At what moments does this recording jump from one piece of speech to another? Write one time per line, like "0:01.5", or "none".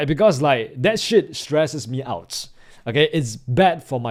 none